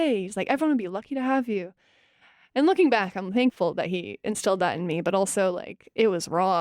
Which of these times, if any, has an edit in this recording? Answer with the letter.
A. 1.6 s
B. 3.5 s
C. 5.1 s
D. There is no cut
B